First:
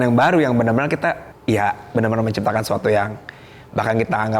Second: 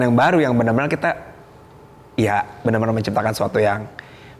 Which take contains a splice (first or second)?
first